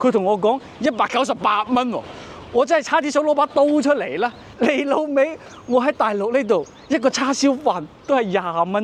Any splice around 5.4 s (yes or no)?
no